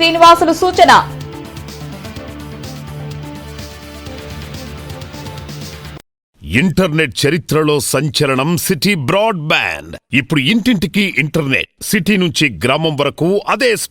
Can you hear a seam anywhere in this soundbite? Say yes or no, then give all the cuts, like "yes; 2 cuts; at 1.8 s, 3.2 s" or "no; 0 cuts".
yes; 1 cut; at 6.4 s